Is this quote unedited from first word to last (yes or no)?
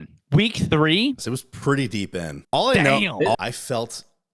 no